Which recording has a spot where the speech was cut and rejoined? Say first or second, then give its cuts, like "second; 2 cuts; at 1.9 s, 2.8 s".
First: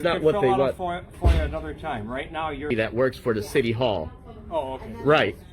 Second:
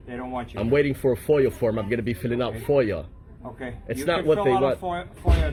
first; 1 cut; at 2.7 s